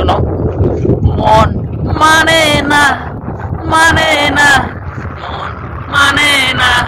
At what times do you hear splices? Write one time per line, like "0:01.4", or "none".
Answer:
none